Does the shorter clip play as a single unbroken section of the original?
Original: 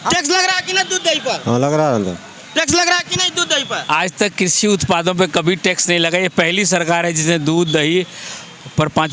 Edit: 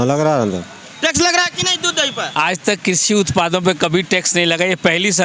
yes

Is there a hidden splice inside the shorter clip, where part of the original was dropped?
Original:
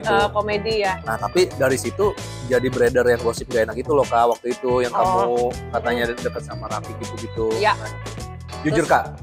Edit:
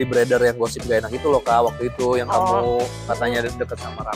no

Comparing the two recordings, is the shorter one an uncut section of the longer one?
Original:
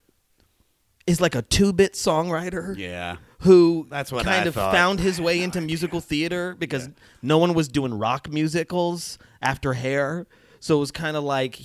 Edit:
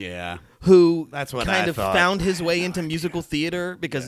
yes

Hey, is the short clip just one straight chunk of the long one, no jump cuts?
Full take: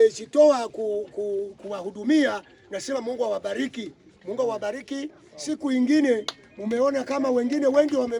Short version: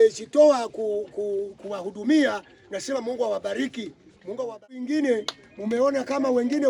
no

